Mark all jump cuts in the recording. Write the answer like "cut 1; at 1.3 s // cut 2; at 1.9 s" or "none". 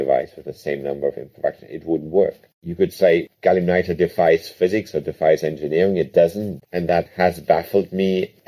cut 1; at 6.9 s